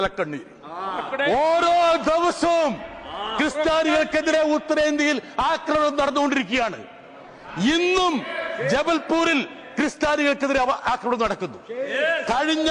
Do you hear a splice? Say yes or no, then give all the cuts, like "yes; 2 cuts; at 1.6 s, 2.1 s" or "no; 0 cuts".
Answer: no; 0 cuts